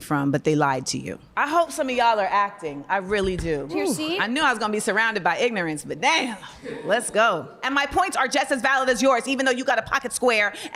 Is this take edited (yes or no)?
no